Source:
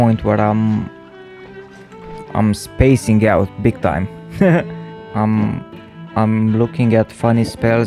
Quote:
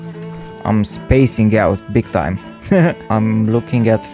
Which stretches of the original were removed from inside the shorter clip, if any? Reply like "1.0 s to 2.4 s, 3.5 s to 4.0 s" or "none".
4.7 s to 6.1 s